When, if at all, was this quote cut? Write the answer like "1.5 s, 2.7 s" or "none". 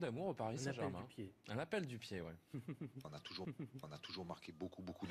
none